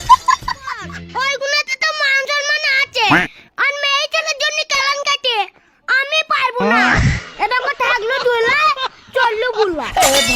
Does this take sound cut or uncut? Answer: cut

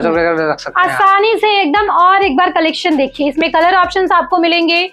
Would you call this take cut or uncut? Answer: uncut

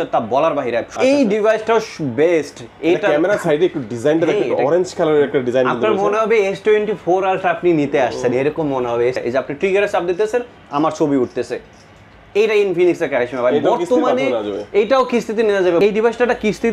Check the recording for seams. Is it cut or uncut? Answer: cut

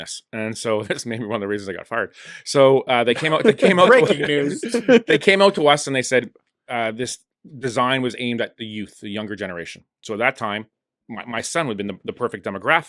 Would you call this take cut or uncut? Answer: uncut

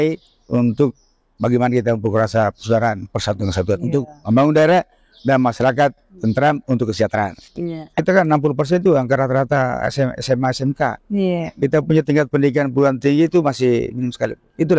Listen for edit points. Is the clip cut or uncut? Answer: cut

